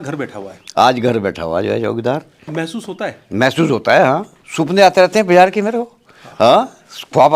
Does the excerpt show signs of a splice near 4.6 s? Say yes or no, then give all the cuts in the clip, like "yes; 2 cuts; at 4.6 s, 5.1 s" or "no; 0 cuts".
no; 1 cut; at 2.5 s